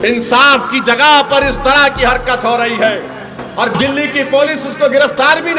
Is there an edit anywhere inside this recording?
no; 0 cuts

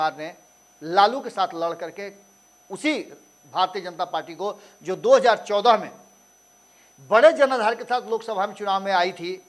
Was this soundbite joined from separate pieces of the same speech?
no; 0 cuts

